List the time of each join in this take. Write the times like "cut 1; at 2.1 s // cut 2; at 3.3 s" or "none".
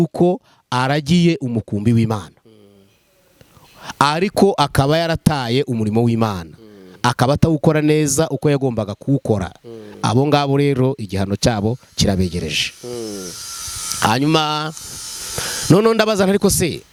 none